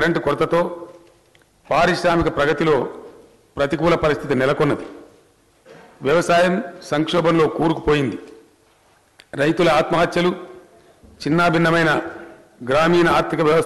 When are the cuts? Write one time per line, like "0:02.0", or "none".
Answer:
0:06.5